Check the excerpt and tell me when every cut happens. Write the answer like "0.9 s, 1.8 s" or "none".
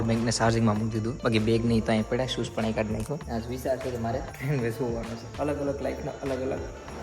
1.1 s, 3.2 s, 4.3 s, 5.2 s